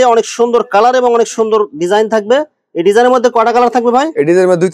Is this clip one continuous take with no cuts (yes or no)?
yes